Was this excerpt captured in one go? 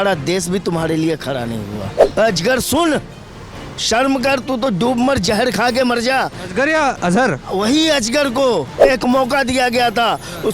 no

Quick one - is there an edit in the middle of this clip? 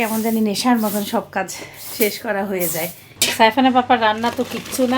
yes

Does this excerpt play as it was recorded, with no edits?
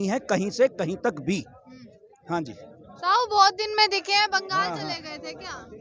yes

